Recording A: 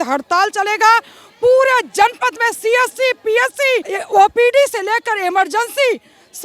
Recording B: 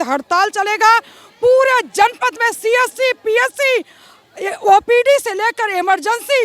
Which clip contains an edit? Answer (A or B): A